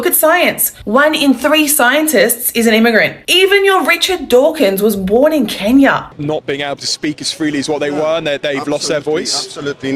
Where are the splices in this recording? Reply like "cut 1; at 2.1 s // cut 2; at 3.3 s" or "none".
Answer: cut 1; at 6.1 s

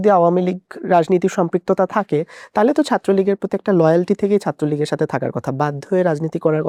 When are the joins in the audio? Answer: none

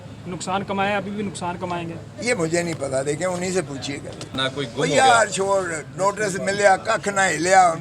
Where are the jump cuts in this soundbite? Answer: cut 1; at 4.3 s

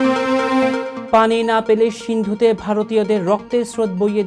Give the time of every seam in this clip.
cut 1; at 0.9 s

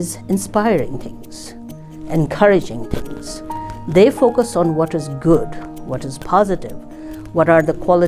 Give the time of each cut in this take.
none

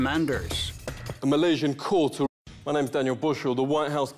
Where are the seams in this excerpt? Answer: none

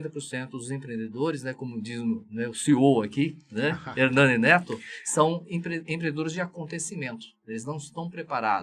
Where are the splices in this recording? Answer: none

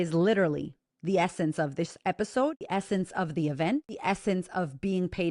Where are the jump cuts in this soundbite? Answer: cut 1; at 2.6 s // cut 2; at 3.9 s

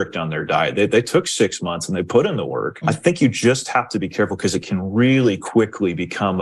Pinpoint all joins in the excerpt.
cut 1; at 2.8 s

